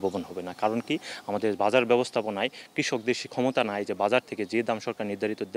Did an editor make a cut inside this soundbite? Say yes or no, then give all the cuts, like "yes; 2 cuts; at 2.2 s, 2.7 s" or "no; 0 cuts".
no; 0 cuts